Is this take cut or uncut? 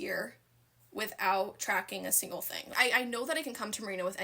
cut